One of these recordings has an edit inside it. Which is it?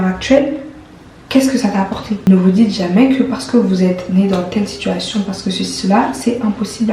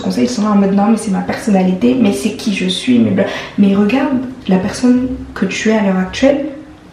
first; 1 cut; at 2.2 s

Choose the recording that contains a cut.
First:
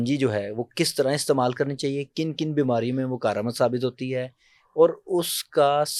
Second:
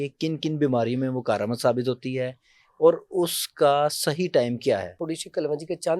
second; 1 cut; at 5.0 s

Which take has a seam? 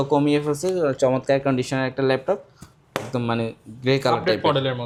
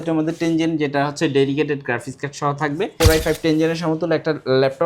second; 1 cut; at 2.9 s

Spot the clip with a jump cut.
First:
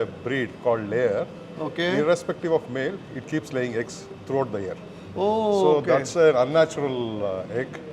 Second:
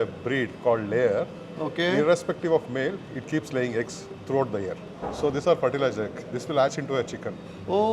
first; 1 cut; at 4.9 s

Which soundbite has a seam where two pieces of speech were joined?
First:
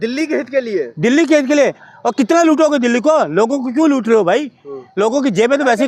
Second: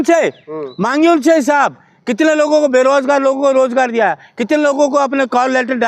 first; 1 cut; at 1.8 s

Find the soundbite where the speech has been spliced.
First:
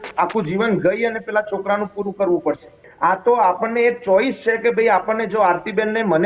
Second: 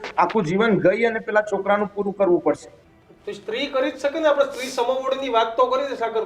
first; 1 cut; at 2.8 s

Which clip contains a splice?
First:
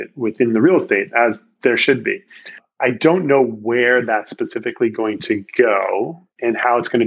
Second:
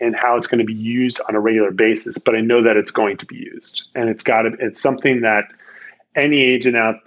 first; 1 cut; at 2.7 s

